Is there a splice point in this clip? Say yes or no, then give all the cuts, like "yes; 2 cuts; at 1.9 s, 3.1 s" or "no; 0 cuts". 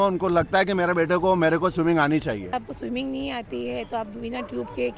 yes; 1 cut; at 2.7 s